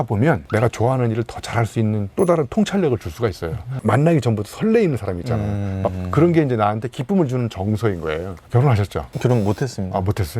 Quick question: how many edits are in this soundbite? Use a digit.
2